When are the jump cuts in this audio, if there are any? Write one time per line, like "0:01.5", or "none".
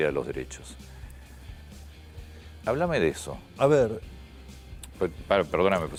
none

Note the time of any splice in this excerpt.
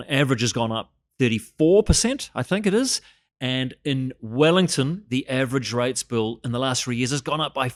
none

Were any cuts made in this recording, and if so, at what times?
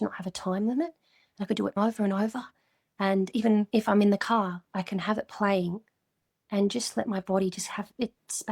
0:03.7

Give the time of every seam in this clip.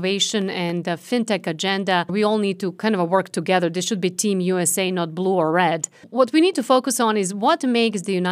0:02.1
0:06.0

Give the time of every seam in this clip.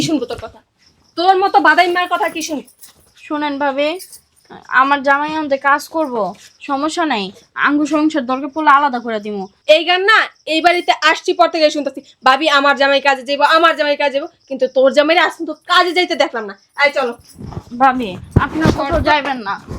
none

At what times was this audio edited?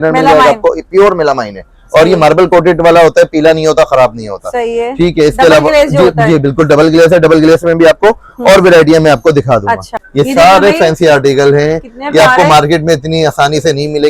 0:10.0

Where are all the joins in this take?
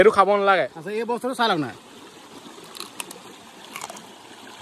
none

